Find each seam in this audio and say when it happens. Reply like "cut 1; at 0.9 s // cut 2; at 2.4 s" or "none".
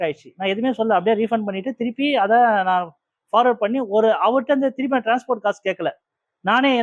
none